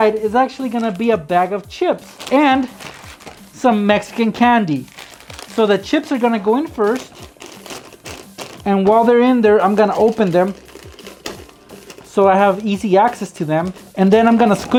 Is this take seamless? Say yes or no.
yes